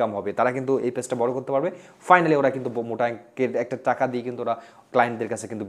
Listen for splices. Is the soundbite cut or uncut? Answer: uncut